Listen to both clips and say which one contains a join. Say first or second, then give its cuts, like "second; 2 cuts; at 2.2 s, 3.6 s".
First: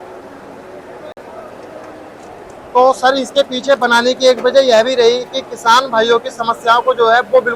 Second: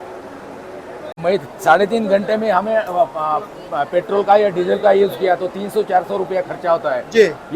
second; 1 cut; at 1.1 s